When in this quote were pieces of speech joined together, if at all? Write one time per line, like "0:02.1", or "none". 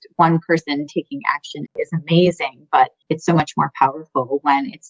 0:01.7
0:03.0